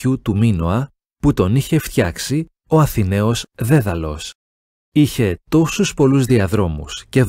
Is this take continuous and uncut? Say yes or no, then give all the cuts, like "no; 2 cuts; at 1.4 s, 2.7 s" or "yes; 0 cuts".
yes; 0 cuts